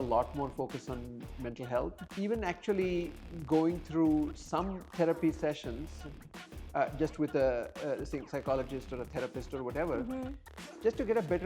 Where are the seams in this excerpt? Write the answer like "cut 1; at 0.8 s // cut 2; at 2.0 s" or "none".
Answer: cut 1; at 2.0 s